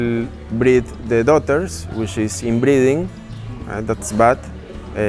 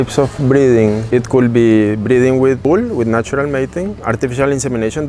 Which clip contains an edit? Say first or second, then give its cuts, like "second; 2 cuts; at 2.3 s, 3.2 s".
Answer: second; 3 cuts; at 1.1 s, 2.6 s, 4.0 s